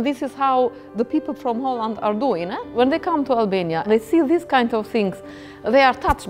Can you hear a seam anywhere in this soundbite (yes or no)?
yes